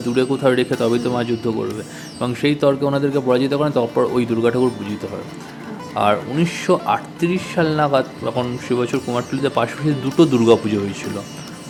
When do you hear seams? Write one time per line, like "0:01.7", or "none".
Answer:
none